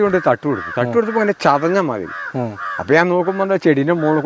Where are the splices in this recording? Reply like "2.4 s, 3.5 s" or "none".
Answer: none